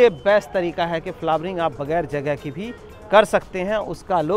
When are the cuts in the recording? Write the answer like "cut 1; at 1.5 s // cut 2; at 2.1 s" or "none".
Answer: none